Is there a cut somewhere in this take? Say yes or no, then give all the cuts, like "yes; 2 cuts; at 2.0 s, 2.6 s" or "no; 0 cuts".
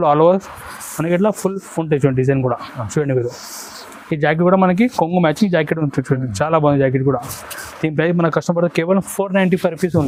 no; 0 cuts